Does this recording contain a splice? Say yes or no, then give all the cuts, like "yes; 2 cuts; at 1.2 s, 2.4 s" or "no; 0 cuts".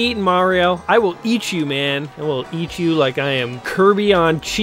yes; 2 cuts; at 2.1 s, 3.6 s